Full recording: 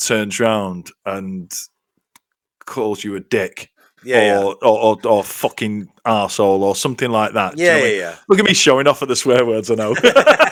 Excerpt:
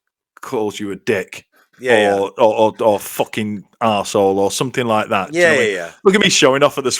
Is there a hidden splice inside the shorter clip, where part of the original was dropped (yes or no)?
no